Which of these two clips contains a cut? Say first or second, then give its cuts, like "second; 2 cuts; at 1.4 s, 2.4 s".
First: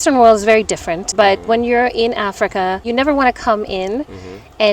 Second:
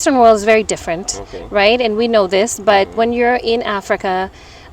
first; 2 cuts; at 1.1 s, 2.8 s